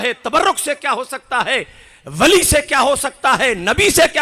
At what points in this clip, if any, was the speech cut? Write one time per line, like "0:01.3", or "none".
none